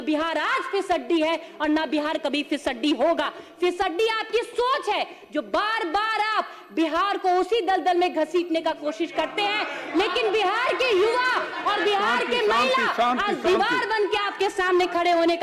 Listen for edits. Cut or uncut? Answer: uncut